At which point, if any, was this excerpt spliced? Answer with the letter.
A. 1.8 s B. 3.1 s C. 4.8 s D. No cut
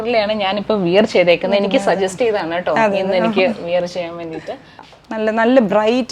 C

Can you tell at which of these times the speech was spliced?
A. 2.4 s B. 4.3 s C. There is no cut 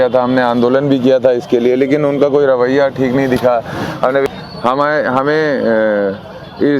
B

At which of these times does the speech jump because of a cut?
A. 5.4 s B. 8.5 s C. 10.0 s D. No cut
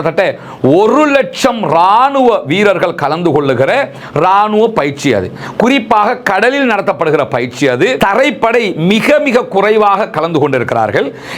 D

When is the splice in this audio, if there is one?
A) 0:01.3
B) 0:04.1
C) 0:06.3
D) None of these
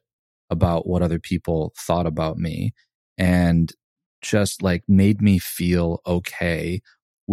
B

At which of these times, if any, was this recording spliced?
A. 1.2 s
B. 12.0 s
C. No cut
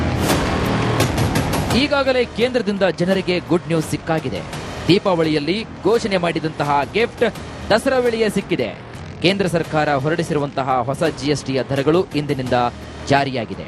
A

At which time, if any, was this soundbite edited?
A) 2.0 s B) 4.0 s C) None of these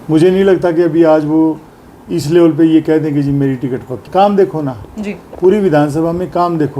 B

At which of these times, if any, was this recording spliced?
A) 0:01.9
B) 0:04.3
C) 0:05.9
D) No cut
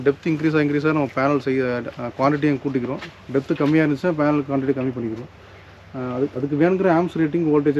D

